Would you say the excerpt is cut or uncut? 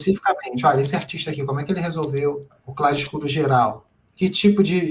cut